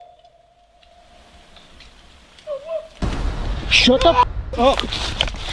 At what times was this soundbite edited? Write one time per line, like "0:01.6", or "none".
none